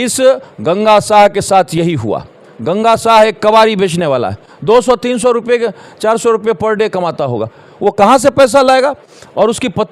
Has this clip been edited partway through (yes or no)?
no